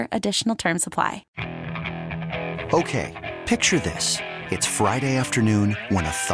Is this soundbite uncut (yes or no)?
no